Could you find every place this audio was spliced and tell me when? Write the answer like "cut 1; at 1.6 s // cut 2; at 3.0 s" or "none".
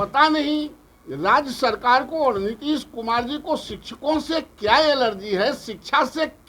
none